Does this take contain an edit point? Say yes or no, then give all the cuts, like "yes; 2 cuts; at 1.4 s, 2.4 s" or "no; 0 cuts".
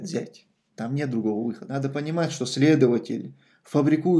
yes; 1 cut; at 1.7 s